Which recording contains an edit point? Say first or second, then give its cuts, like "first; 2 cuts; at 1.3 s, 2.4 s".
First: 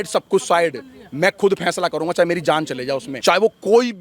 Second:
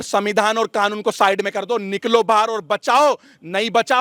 first; 1 cut; at 3.1 s